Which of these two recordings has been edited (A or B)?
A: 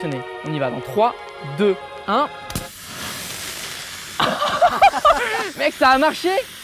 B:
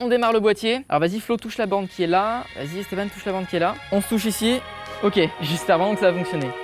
B